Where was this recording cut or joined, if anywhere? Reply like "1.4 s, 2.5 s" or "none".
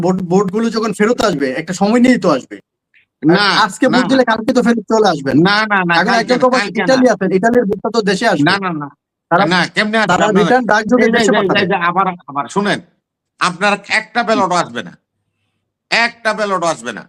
none